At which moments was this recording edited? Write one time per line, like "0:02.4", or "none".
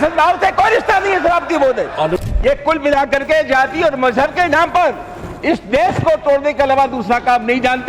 0:02.2